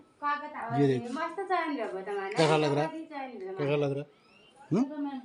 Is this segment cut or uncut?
uncut